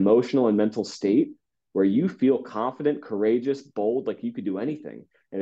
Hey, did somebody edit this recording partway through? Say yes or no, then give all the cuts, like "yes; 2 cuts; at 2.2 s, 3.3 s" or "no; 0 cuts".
no; 0 cuts